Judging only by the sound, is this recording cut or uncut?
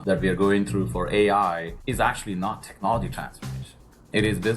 cut